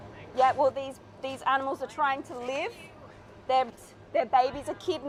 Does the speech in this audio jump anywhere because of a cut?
no; 0 cuts

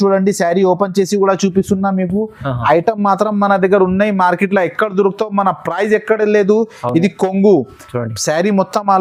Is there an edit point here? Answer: no; 0 cuts

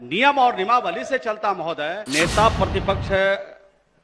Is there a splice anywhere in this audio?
yes; 1 cut; at 2.0 s

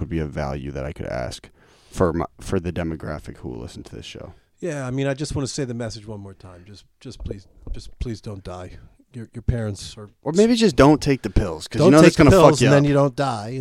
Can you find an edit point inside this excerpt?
no; 0 cuts

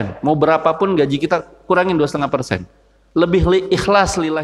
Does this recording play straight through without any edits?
yes; 0 cuts

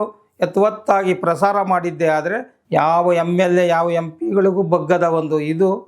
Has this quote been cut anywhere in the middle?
yes; 1 cut; at 2.5 s

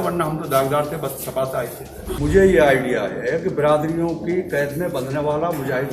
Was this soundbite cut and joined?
yes; 1 cut; at 2.2 s

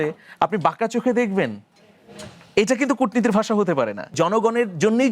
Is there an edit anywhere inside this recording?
yes; 1 cut; at 4.1 s

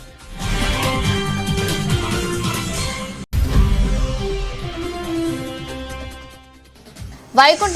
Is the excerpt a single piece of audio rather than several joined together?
no; 1 cut; at 3.1 s

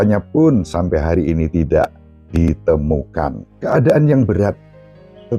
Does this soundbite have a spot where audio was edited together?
yes; 1 cut; at 3.4 s

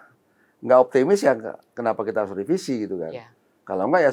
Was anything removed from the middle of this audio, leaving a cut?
no; 0 cuts

